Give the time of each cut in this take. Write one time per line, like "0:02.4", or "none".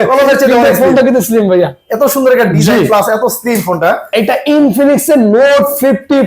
0:04.1